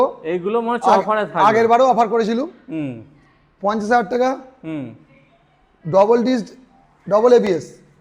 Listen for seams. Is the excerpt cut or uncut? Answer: uncut